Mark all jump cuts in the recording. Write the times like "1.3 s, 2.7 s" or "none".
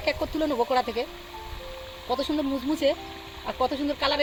none